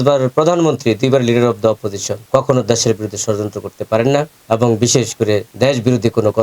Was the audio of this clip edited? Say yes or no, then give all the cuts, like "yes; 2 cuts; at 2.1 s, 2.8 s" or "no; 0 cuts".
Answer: yes; 3 cuts; at 2.1 s, 4.4 s, 5.5 s